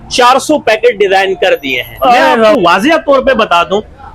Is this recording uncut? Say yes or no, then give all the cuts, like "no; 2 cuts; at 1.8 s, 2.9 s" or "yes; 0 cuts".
no; 1 cut; at 2.5 s